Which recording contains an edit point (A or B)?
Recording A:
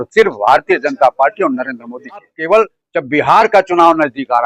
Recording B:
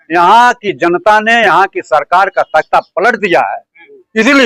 A